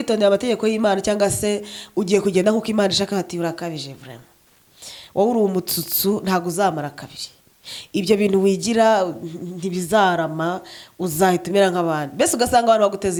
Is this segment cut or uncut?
uncut